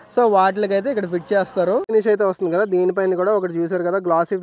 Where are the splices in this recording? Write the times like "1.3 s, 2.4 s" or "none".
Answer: 1.9 s

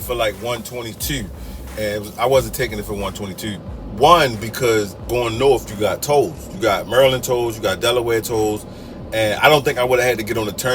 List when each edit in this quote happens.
1.5 s

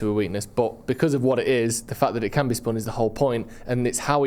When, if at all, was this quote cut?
none

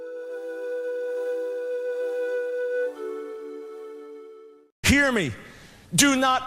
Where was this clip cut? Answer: 4.8 s

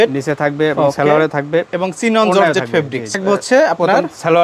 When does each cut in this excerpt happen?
3.2 s

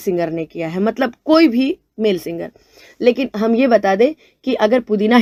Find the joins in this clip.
none

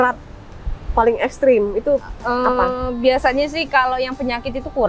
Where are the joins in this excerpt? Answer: none

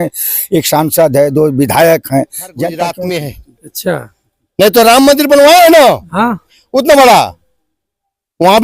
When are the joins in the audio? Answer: 2.8 s

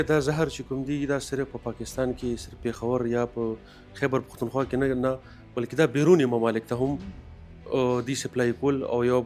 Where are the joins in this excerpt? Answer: none

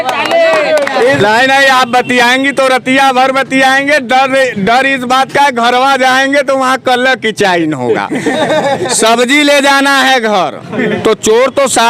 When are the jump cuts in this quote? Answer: 1.2 s, 11.0 s

